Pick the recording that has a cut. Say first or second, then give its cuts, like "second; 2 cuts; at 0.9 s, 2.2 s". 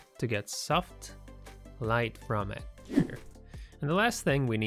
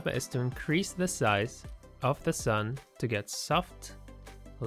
first; 1 cut; at 3.0 s